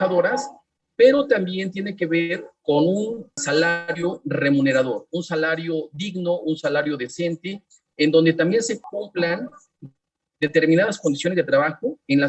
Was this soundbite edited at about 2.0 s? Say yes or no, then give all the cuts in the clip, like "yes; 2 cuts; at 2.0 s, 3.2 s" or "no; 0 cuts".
no; 2 cuts; at 3.4 s, 8.8 s